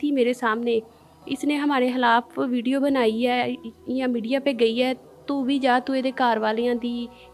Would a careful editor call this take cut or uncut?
uncut